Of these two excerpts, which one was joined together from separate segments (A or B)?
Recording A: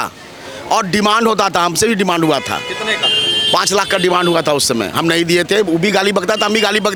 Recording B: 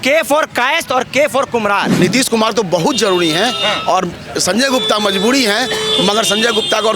B